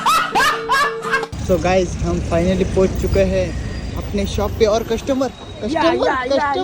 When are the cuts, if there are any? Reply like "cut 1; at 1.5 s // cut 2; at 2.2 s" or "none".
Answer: cut 1; at 1.3 s